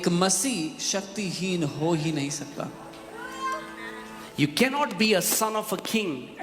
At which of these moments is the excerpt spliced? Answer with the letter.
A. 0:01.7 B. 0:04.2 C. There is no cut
B